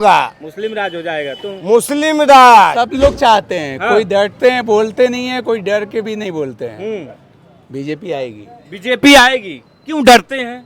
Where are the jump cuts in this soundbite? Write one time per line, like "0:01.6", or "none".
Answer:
0:02.7